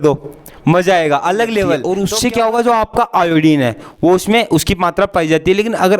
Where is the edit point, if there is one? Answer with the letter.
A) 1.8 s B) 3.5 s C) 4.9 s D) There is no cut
A